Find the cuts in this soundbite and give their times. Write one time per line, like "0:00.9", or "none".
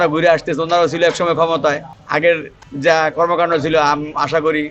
none